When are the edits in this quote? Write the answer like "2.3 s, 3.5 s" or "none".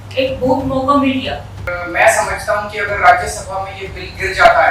1.7 s